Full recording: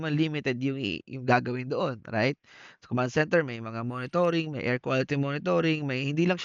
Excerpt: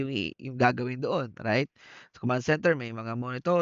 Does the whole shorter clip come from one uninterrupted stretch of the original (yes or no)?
yes